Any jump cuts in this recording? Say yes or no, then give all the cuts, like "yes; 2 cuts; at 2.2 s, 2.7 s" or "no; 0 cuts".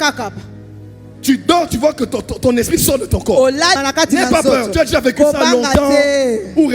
yes; 1 cut; at 3.8 s